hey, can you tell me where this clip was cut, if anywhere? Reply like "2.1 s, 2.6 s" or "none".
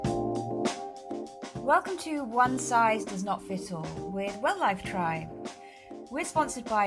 1.6 s